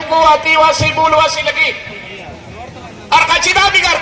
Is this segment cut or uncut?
uncut